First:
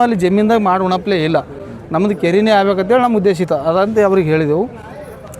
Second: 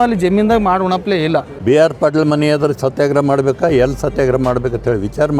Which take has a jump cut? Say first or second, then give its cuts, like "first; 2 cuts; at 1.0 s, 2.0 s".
second; 1 cut; at 1.5 s